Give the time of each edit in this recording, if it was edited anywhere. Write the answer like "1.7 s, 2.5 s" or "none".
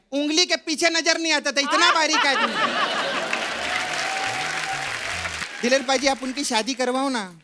5.4 s